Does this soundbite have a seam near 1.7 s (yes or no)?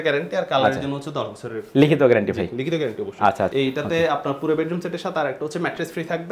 no